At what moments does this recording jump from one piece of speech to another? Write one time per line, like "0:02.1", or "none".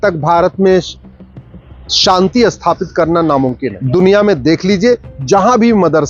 0:03.7